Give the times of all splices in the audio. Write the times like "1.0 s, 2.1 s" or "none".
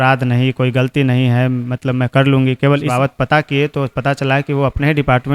2.9 s

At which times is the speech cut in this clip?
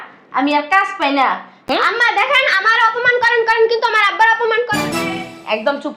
1.5 s

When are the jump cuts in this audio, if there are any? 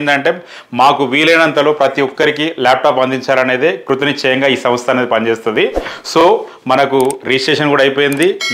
none

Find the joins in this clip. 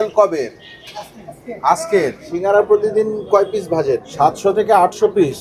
2.3 s, 4.1 s

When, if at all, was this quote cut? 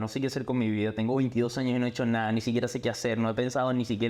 none

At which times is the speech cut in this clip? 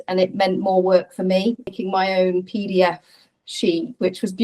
1.7 s

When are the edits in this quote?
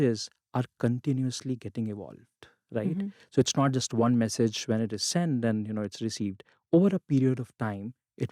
none

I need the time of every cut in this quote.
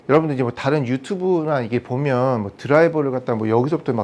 none

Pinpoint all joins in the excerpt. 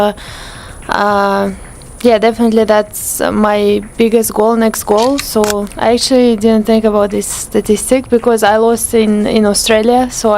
5.7 s

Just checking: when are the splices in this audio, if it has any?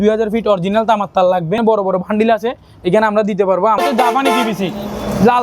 1.6 s, 3.8 s

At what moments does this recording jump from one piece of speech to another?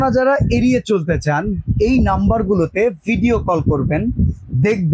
none

